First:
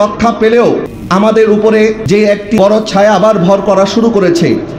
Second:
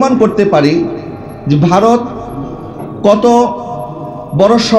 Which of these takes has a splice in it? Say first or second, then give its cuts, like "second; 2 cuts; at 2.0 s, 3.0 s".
first; 2 cuts; at 0.9 s, 2.4 s